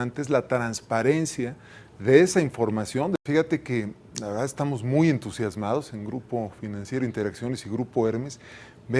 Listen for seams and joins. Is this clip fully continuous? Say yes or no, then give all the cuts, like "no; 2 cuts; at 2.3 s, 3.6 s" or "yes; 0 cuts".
no; 1 cut; at 3.2 s